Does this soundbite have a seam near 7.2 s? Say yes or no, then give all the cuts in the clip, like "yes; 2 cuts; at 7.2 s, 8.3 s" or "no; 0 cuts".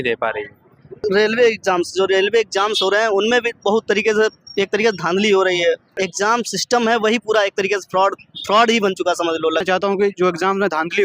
no; 3 cuts; at 1.0 s, 5.9 s, 9.6 s